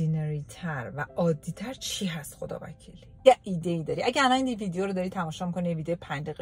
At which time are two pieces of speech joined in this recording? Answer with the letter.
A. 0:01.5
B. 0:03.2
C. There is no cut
B